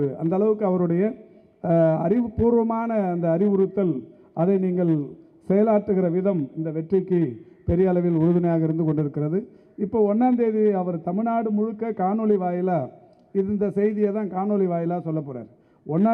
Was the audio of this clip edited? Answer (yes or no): no